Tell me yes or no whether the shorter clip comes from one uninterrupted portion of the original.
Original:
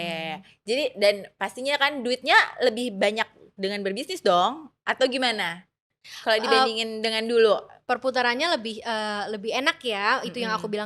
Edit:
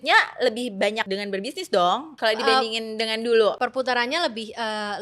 no